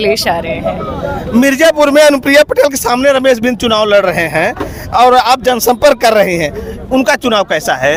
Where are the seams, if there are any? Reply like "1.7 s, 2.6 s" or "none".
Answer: none